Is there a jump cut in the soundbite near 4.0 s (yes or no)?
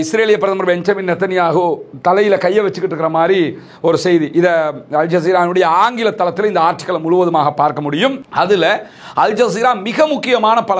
no